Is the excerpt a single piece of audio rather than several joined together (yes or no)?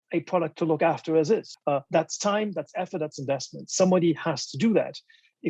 no